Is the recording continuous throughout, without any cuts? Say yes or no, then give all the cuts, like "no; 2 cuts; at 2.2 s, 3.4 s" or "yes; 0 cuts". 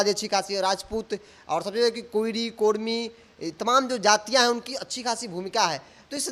yes; 0 cuts